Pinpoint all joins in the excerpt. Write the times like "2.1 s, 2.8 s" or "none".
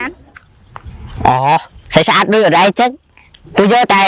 none